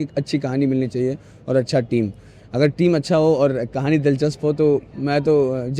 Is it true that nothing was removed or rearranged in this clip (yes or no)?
yes